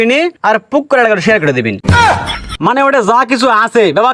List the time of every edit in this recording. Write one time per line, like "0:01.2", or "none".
0:02.4